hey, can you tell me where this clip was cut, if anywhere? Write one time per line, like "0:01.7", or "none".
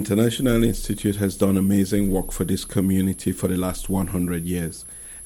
none